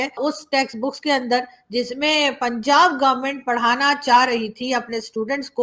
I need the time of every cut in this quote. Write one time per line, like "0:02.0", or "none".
none